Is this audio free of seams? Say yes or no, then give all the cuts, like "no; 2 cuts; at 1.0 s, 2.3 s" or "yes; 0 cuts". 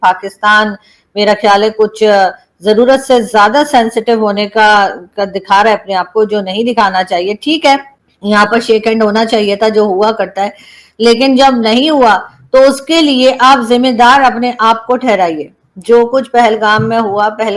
yes; 0 cuts